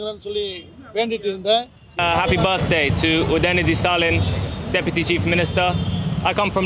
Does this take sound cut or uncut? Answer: cut